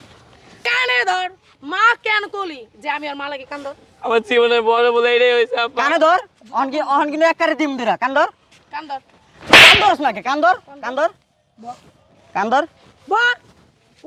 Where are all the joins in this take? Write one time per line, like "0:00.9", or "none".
none